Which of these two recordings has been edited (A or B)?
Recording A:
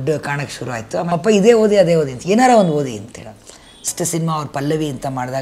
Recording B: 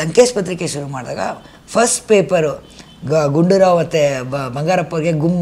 A